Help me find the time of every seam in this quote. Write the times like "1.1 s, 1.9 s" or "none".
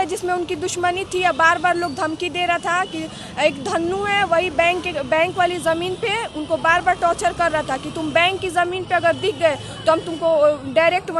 none